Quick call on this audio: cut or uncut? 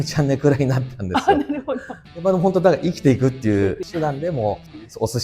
cut